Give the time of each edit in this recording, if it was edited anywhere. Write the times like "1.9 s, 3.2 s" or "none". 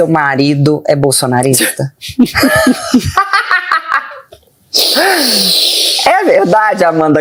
none